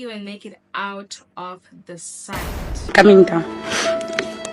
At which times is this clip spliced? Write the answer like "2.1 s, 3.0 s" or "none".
2.9 s